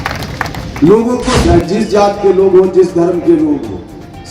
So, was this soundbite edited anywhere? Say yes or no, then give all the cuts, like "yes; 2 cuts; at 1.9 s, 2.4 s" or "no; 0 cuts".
yes; 1 cut; at 1.4 s